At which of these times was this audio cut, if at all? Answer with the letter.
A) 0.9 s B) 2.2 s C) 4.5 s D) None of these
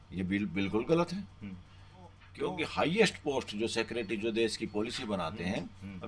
B